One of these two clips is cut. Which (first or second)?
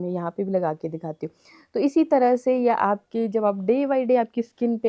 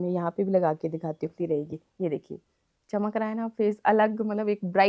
second